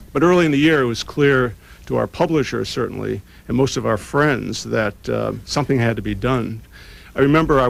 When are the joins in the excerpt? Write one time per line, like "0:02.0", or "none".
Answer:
none